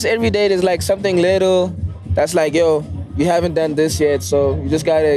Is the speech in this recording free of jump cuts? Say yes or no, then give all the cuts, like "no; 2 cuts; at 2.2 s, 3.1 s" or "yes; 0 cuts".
no; 2 cuts; at 2.0 s, 3.0 s